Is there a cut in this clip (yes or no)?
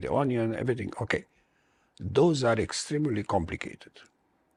no